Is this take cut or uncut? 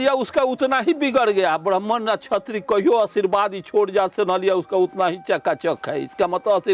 uncut